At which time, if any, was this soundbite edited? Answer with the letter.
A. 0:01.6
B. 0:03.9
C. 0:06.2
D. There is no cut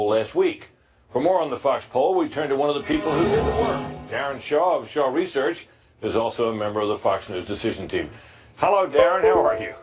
D